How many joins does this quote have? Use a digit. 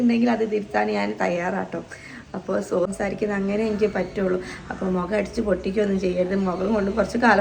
1